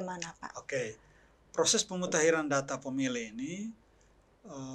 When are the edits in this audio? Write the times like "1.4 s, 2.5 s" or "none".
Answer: none